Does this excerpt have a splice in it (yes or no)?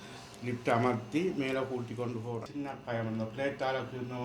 yes